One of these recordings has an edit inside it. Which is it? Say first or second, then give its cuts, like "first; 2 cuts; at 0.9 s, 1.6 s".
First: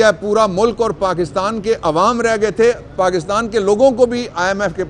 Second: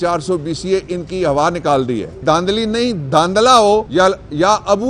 second; 2 cuts; at 2.2 s, 3.9 s